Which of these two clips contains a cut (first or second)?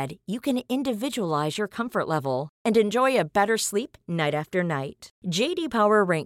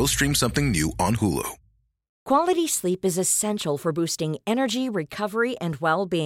second